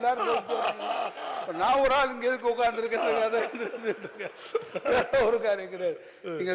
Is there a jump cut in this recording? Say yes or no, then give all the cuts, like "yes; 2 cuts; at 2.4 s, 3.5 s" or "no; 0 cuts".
no; 0 cuts